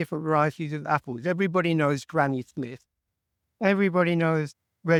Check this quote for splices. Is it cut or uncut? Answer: uncut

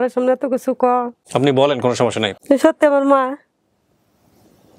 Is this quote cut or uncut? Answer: cut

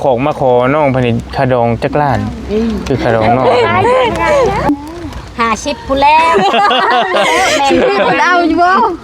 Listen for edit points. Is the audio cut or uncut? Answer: cut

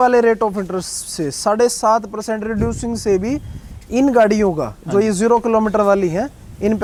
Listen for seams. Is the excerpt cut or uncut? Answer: uncut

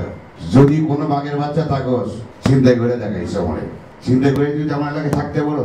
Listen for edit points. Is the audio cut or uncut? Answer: cut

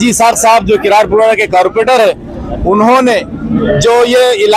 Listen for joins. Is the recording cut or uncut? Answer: uncut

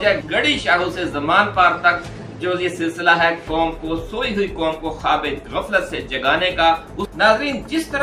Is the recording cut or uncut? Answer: cut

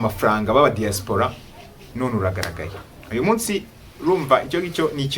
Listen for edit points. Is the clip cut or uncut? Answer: uncut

